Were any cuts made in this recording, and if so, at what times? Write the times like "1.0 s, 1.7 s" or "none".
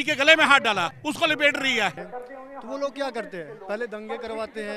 1.0 s, 2.0 s

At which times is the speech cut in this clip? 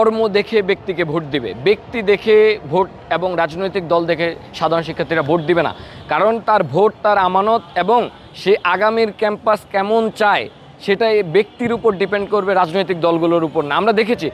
none

